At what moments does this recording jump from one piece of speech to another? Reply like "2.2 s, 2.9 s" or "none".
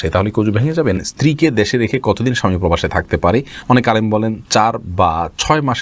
1.1 s